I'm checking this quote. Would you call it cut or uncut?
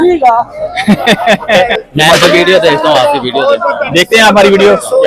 cut